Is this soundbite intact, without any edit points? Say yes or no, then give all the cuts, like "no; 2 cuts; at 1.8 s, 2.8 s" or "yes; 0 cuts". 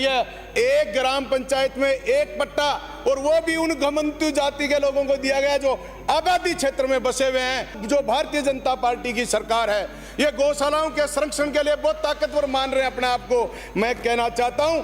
no; 1 cut; at 7.8 s